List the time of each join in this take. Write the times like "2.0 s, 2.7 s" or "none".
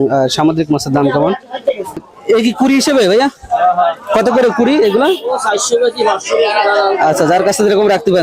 2.0 s